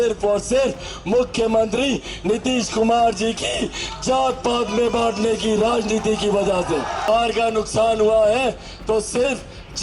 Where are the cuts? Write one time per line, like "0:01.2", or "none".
0:07.1